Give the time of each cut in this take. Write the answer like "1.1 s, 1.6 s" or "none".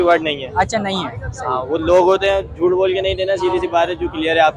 none